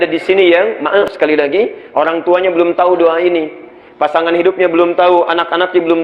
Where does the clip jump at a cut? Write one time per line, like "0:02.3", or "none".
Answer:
0:01.0